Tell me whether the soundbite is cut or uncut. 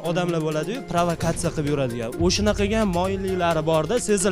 uncut